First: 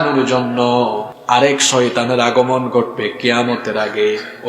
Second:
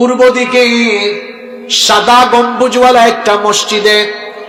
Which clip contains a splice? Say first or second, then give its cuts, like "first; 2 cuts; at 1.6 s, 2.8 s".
first; 1 cut; at 1.1 s